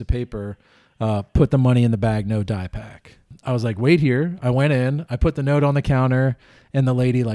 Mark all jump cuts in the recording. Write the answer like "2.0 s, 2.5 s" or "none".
3.3 s